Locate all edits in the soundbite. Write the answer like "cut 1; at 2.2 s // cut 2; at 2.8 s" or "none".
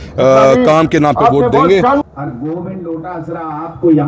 cut 1; at 2.0 s